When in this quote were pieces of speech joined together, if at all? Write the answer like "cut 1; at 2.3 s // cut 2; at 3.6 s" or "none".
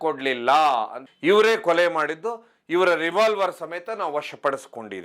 cut 1; at 1.0 s